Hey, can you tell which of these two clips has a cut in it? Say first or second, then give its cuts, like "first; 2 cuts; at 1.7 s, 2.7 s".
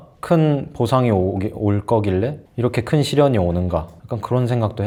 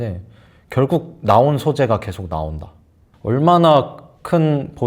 second; 1 cut; at 3.1 s